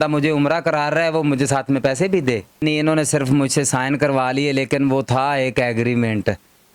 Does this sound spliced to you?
yes; 1 cut; at 2.6 s

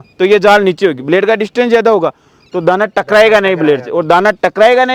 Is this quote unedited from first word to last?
yes; 0 cuts

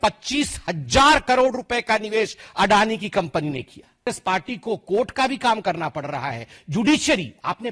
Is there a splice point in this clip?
yes; 1 cut; at 4.1 s

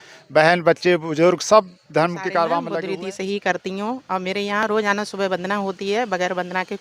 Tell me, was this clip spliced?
yes; 1 cut; at 2.7 s

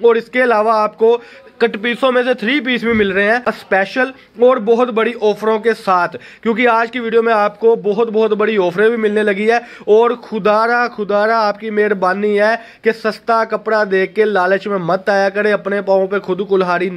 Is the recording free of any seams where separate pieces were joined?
no; 1 cut; at 3.5 s

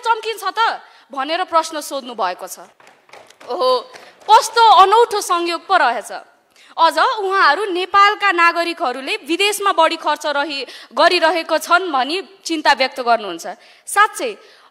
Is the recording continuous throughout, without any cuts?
yes; 0 cuts

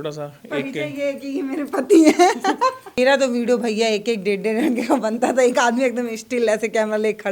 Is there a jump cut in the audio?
yes; 1 cut; at 2.9 s

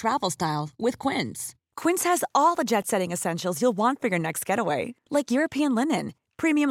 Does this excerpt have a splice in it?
no; 0 cuts

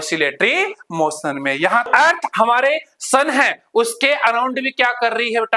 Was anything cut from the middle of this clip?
yes; 1 cut; at 1.9 s

